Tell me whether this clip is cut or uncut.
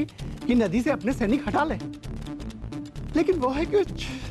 cut